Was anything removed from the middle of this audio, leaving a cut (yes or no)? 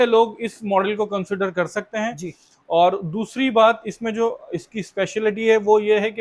no